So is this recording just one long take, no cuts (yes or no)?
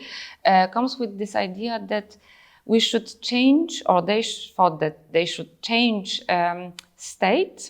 yes